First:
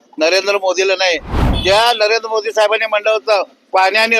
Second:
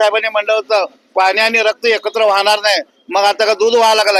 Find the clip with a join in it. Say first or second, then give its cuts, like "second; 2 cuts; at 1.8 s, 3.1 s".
first; 1 cut; at 1.4 s